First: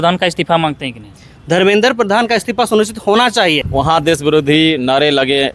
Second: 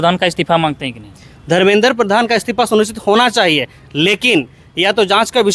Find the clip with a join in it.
first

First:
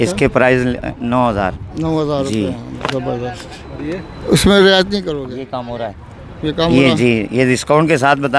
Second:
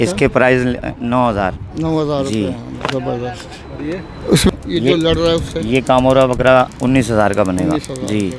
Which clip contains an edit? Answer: second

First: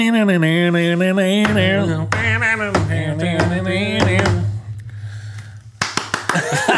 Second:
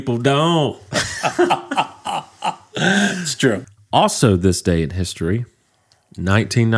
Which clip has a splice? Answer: second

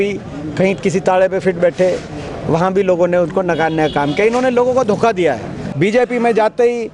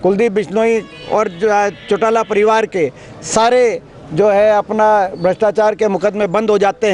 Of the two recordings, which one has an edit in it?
first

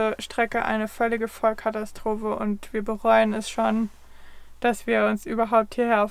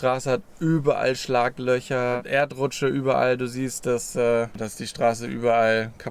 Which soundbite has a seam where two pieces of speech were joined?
second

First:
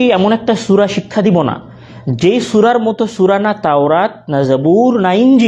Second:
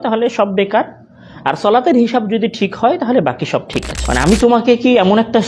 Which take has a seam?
second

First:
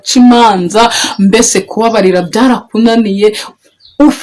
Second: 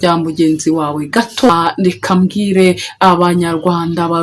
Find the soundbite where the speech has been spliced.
second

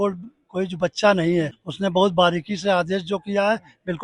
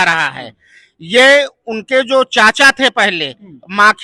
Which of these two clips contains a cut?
first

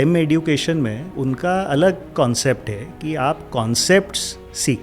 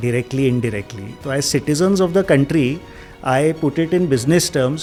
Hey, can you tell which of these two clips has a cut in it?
first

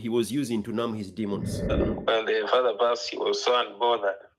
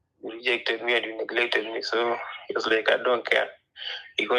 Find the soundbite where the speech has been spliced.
first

